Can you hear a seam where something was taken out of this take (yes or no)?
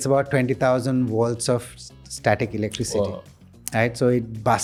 no